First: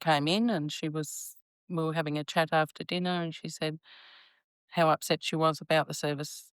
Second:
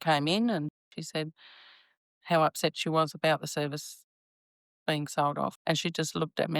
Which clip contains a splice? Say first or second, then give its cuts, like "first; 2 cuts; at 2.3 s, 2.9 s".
second; 2 cuts; at 0.8 s, 5.6 s